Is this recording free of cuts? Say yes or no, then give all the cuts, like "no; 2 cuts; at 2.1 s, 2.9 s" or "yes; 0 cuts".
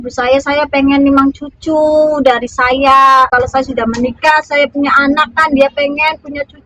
no; 1 cut; at 3.3 s